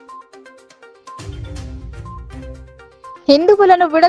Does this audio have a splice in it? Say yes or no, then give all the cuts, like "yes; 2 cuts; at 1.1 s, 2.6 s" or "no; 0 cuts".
yes; 1 cut; at 2.4 s